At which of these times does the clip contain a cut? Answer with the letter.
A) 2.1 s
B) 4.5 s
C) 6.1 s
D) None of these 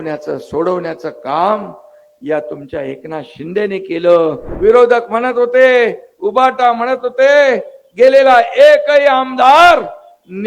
B